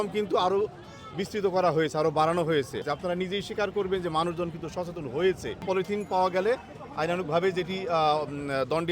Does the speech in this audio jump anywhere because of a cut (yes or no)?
yes